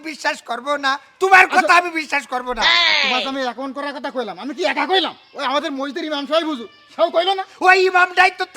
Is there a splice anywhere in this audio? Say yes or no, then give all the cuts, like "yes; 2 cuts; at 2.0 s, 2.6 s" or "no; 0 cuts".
no; 0 cuts